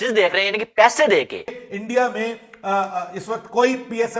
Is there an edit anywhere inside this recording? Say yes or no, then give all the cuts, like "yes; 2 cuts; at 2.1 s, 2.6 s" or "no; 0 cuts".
yes; 1 cut; at 1.6 s